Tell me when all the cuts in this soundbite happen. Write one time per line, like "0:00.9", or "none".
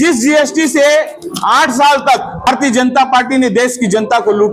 0:02.5